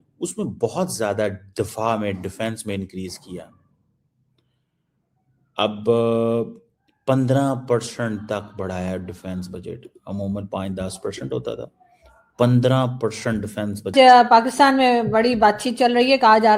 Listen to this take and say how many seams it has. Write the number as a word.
one